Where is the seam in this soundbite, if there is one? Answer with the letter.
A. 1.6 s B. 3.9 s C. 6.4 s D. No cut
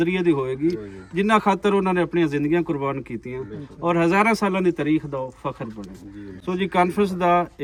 D